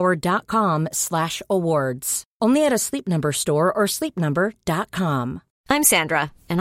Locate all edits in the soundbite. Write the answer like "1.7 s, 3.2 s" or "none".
none